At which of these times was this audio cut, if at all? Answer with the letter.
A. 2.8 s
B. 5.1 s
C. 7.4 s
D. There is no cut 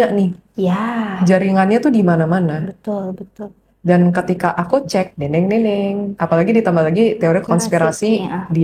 C